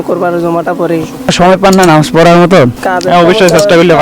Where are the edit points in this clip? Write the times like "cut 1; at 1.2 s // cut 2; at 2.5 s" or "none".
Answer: cut 1; at 1.3 s // cut 2; at 2.8 s